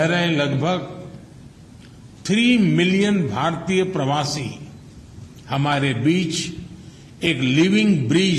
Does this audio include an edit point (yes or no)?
no